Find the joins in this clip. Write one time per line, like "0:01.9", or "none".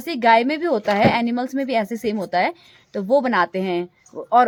none